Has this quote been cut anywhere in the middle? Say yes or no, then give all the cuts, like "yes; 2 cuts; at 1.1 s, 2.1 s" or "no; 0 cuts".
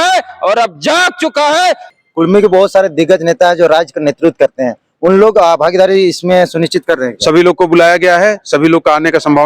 yes; 1 cut; at 1.9 s